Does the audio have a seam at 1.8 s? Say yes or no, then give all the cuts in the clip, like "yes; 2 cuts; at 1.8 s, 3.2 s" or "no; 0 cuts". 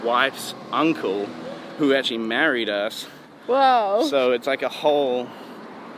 no; 0 cuts